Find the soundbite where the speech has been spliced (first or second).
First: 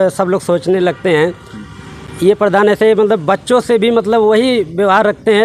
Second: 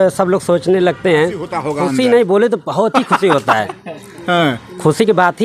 second